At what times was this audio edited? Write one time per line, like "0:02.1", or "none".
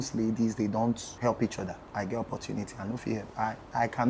0:01.1
0:01.8